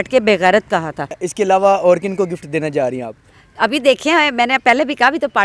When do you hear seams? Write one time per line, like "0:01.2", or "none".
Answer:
0:01.2